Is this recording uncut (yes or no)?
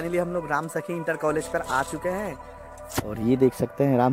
yes